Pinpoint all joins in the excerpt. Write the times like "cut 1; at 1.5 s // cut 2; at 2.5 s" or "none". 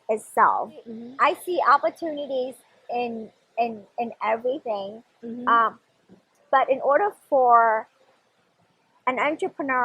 cut 1; at 1.0 s